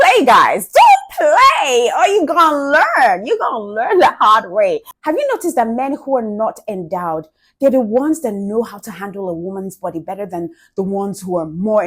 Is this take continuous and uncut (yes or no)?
no